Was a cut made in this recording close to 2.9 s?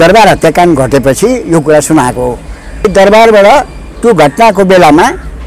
yes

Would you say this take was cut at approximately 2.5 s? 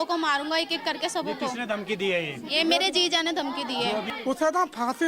no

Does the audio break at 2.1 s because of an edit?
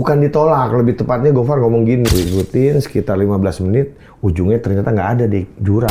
yes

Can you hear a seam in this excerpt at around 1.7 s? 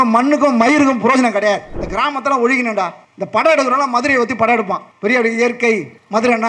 yes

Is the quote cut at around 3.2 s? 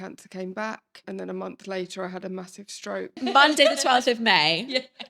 yes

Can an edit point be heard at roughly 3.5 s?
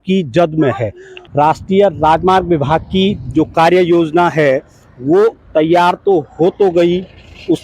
no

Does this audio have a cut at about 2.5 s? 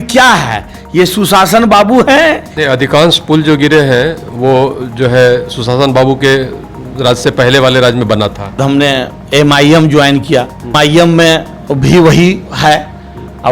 yes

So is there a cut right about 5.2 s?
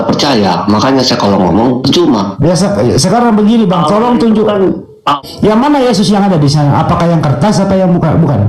yes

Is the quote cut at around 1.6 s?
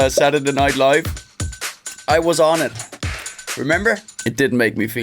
no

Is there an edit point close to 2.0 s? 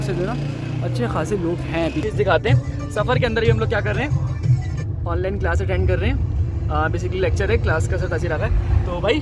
yes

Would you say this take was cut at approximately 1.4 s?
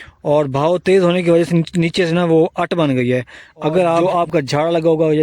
no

